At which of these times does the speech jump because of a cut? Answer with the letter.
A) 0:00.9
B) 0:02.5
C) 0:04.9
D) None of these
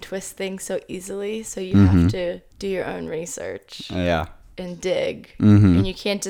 B